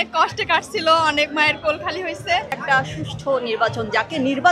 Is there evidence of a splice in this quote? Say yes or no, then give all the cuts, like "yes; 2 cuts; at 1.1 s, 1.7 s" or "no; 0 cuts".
yes; 1 cut; at 2.6 s